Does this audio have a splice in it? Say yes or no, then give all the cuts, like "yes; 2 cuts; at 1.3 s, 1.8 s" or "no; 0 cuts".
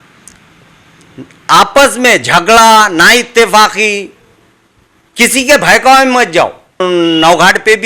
yes; 1 cut; at 6.8 s